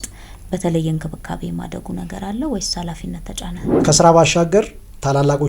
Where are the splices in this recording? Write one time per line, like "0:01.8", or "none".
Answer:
0:03.7